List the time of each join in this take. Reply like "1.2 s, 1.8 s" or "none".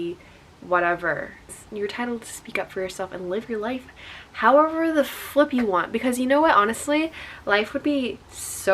1.6 s